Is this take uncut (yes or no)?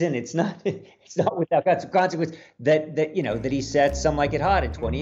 yes